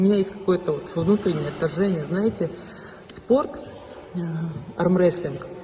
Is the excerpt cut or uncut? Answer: uncut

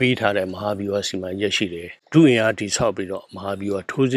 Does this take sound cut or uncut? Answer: cut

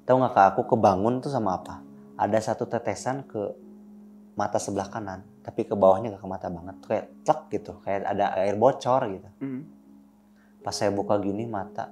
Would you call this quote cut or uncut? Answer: uncut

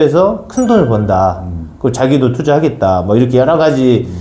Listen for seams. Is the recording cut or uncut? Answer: uncut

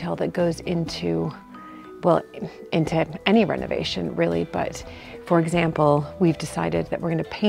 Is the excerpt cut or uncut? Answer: uncut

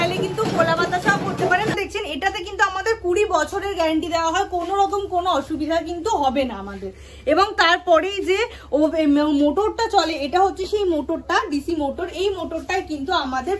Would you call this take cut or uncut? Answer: cut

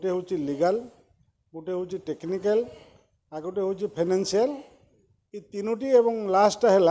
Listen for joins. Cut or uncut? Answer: uncut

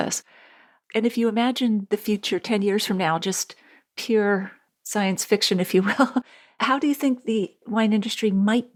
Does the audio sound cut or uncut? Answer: uncut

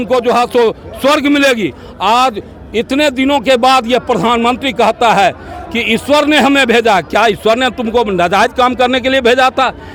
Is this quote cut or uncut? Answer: uncut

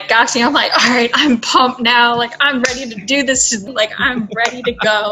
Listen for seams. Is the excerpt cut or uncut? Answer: cut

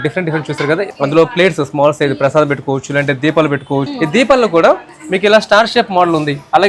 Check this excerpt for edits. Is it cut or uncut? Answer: cut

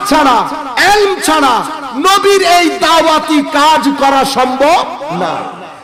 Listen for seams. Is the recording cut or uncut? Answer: uncut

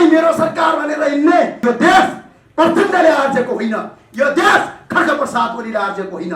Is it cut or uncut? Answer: cut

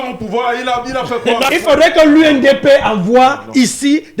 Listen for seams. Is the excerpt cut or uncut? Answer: cut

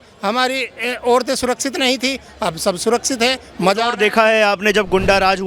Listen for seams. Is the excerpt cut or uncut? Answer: uncut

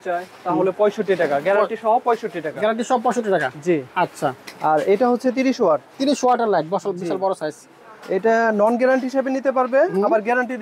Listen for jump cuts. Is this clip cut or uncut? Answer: uncut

